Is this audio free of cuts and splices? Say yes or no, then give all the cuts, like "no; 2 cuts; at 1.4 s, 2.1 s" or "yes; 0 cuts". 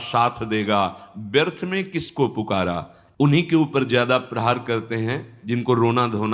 no; 1 cut; at 3.2 s